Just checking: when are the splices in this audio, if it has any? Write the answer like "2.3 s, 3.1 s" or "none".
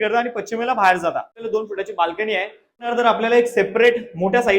1.4 s, 2.9 s